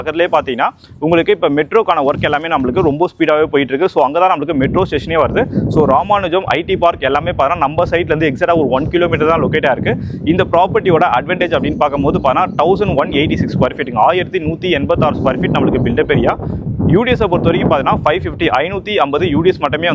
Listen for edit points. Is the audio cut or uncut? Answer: uncut